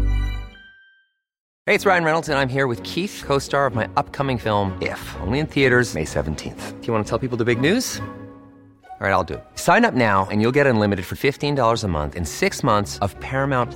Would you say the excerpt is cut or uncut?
cut